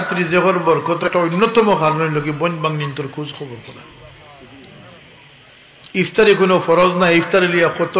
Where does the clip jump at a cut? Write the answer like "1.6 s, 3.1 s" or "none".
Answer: 1.0 s